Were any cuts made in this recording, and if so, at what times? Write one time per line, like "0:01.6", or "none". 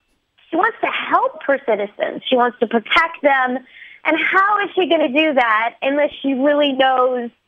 0:01.4